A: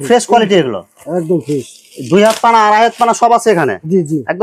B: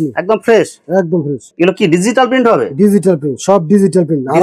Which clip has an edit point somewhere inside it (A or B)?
B